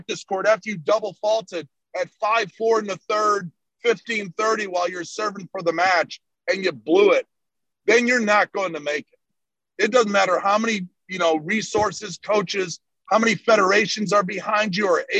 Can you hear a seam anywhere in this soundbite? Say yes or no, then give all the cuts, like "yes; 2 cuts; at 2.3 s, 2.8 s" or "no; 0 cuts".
no; 0 cuts